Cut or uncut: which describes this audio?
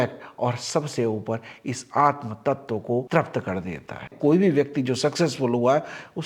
cut